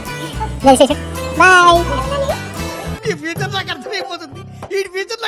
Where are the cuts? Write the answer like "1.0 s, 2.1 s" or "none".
none